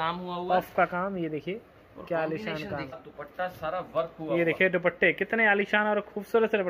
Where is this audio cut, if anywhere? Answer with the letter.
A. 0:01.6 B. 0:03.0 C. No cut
B